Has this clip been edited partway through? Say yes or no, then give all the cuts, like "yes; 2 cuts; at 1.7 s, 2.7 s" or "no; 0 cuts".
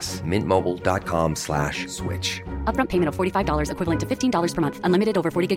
no; 0 cuts